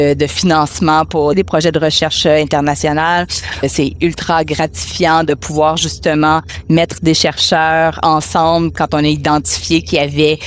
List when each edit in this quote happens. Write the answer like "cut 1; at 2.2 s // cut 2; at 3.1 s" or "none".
cut 1; at 1.4 s // cut 2; at 3.7 s